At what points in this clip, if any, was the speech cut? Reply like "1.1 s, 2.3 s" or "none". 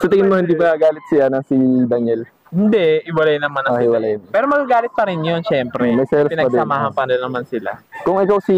none